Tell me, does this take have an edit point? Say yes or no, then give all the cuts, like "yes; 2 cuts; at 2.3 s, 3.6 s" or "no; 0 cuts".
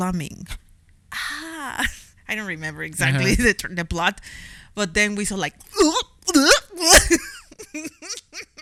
no; 0 cuts